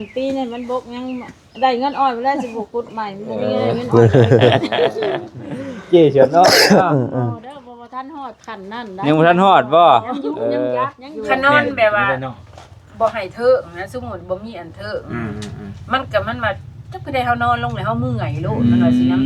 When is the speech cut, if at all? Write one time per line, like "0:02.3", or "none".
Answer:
0:11.3